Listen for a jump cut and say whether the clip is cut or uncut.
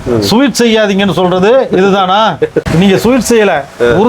cut